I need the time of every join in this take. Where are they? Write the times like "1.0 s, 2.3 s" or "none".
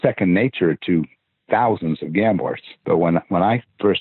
2.7 s